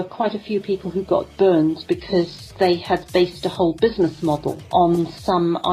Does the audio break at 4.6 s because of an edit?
yes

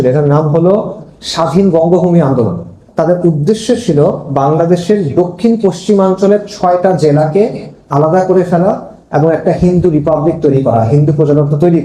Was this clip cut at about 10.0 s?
no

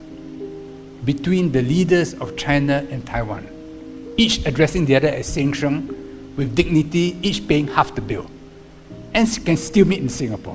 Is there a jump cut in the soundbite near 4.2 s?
no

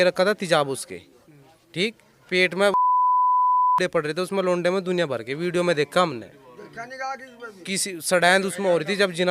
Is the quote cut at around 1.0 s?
no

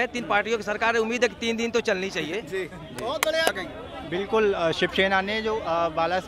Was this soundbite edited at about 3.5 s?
yes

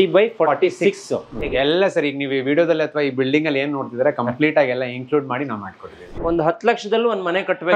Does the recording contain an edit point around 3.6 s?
no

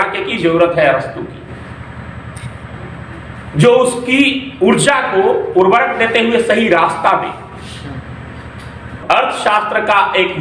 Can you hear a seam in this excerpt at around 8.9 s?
yes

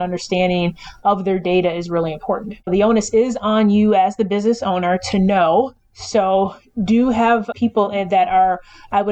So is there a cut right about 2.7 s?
yes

